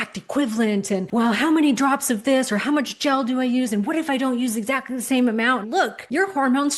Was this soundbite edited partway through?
yes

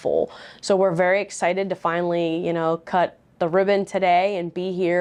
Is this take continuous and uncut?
yes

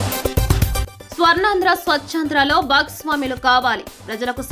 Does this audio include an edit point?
yes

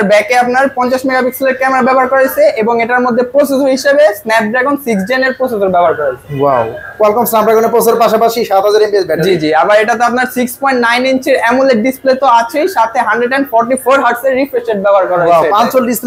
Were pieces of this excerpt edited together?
no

